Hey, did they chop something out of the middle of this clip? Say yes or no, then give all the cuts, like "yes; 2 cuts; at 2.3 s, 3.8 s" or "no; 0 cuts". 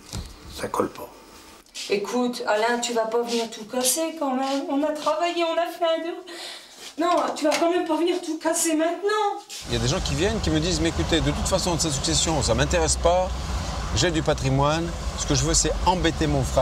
yes; 3 cuts; at 1.9 s, 6.9 s, 9.5 s